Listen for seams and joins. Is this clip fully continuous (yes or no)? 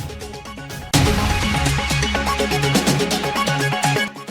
yes